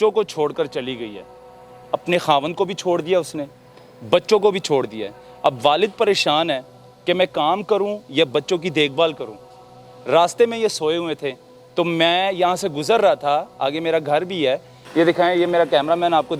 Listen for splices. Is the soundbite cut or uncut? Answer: cut